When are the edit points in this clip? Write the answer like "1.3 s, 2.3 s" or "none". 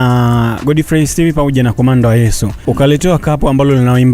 2.5 s